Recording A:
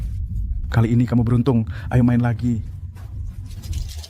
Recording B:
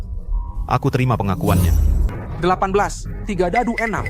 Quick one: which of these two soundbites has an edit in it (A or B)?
B